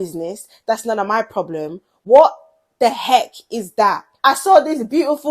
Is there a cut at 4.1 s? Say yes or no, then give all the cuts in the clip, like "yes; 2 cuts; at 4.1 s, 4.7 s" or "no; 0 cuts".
yes; 1 cut; at 4.1 s